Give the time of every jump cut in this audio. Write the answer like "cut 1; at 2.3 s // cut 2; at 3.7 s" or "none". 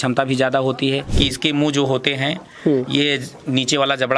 cut 1; at 1.1 s

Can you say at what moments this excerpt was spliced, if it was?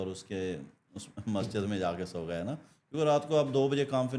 none

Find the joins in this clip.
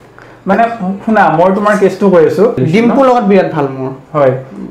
cut 1; at 2.6 s

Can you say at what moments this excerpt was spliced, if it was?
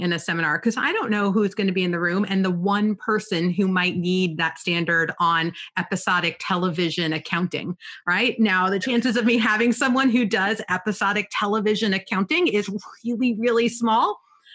none

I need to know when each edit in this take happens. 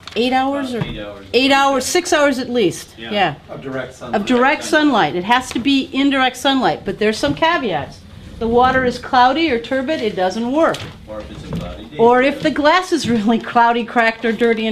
cut 1; at 3.5 s

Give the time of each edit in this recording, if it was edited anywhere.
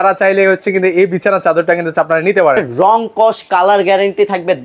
cut 1; at 2.7 s

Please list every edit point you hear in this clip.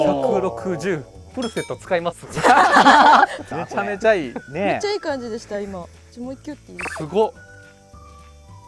none

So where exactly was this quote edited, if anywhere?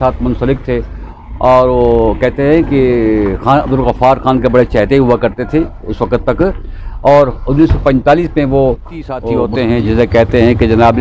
cut 1; at 9.3 s

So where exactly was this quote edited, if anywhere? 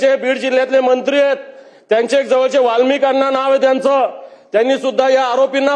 none

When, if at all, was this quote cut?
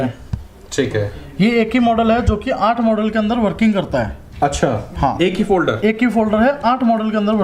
none

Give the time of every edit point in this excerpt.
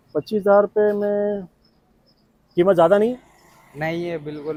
none

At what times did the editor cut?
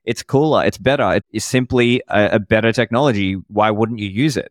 cut 1; at 1.3 s

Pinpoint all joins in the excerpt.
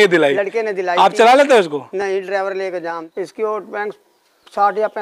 cut 1; at 2.9 s

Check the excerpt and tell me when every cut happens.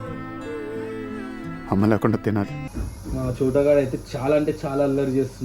cut 1; at 2.6 s

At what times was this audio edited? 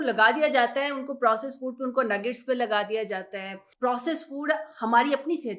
cut 1; at 3.6 s

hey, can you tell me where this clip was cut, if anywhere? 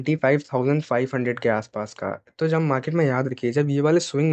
none

